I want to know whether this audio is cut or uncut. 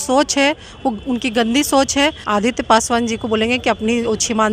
cut